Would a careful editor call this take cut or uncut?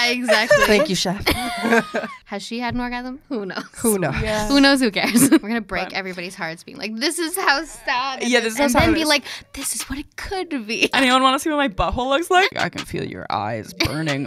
cut